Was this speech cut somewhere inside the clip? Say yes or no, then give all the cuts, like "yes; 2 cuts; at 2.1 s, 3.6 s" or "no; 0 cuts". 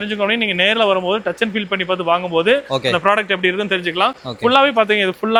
no; 0 cuts